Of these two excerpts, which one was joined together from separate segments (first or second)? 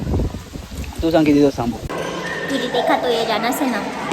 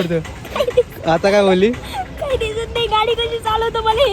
first